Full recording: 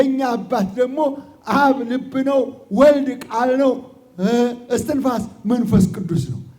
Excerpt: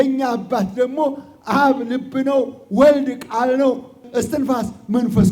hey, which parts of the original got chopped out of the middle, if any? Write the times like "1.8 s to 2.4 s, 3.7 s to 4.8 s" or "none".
4.0 s to 4.6 s